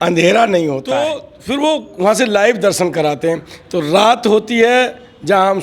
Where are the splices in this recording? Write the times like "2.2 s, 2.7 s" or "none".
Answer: 0.9 s